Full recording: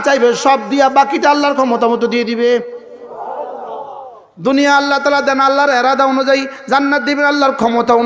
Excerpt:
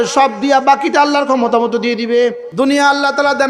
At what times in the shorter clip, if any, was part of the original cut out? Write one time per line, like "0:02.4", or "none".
0:02.4